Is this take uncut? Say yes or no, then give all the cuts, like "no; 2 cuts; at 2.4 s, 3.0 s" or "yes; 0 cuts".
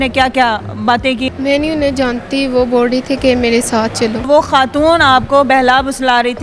no; 2 cuts; at 1.3 s, 4.2 s